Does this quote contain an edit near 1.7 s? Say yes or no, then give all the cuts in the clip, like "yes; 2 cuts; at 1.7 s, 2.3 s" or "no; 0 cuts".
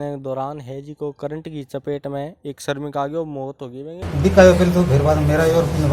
no; 1 cut; at 4.0 s